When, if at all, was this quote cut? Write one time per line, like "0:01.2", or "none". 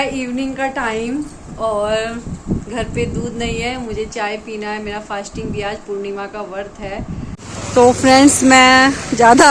0:07.4